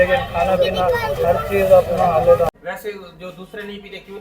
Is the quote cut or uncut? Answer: cut